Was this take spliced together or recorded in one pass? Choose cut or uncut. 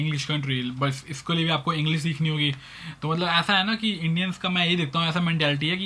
uncut